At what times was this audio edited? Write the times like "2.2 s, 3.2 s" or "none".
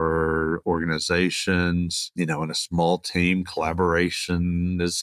2.0 s